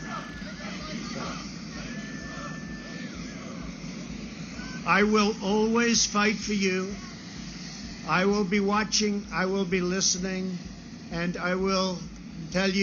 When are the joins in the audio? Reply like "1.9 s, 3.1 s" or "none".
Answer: 6.1 s

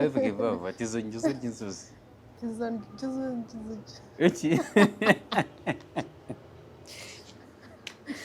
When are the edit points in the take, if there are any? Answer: none

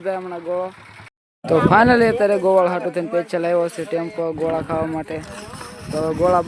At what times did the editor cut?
1.2 s

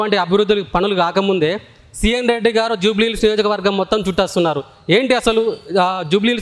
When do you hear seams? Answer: none

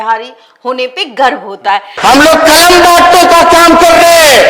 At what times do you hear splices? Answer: 1.9 s

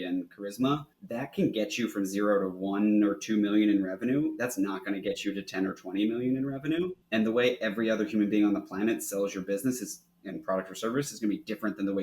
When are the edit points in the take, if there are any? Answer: 1.0 s, 7.0 s

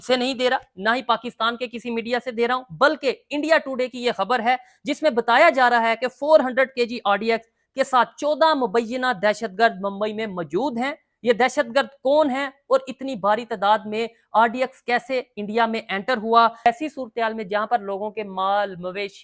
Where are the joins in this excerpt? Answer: 16.7 s

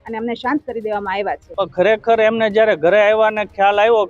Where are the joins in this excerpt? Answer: 1.4 s

